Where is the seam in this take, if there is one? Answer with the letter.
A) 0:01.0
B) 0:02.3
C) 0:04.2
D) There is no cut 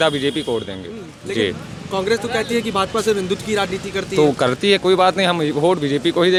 D